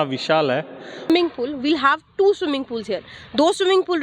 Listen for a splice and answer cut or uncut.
cut